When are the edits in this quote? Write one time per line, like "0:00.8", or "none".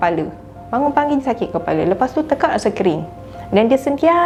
none

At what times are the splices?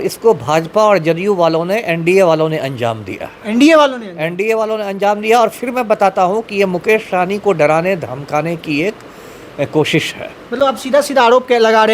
none

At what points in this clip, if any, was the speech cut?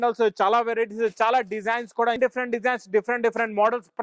0:02.2

